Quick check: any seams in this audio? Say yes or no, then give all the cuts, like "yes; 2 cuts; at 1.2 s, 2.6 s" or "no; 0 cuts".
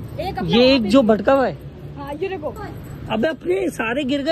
yes; 1 cut; at 2.6 s